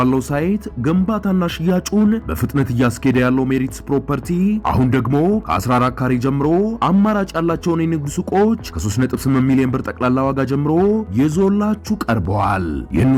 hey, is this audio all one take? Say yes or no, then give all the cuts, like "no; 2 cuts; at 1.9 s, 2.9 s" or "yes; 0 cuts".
yes; 0 cuts